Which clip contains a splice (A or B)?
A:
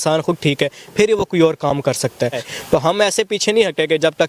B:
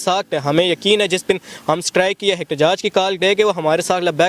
A